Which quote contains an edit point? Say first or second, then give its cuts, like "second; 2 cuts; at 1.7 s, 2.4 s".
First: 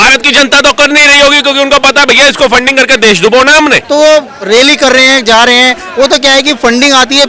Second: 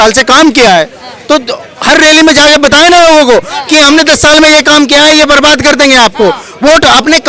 first; 1 cut; at 3.8 s